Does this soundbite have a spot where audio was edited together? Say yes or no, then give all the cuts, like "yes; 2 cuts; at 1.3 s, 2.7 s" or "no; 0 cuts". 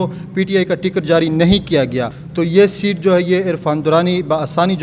yes; 1 cut; at 2.2 s